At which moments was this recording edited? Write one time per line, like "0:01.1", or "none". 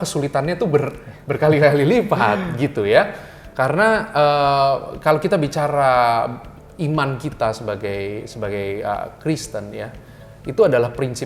none